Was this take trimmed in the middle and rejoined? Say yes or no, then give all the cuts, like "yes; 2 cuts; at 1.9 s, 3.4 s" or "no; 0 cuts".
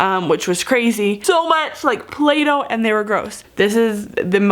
yes; 2 cuts; at 1.2 s, 3.4 s